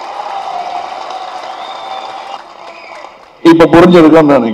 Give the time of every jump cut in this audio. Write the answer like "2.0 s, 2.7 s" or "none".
2.4 s